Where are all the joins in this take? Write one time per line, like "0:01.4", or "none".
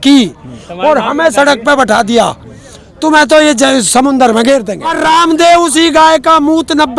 0:04.8